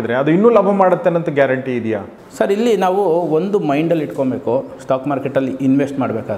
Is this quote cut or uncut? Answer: cut